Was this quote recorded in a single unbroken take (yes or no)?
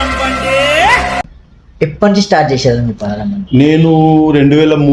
yes